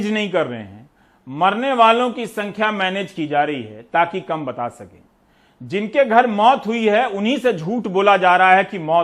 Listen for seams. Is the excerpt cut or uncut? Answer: uncut